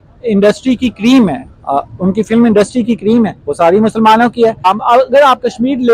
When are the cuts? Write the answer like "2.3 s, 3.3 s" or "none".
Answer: 4.6 s